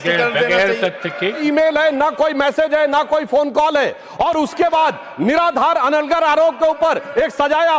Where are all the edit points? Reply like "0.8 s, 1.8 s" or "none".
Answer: 1.4 s